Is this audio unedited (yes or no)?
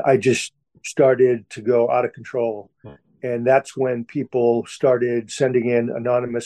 no